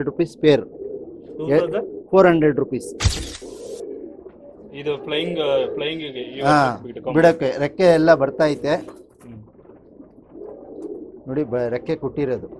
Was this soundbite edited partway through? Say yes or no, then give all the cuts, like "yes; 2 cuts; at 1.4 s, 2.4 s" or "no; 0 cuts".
yes; 1 cut; at 3.3 s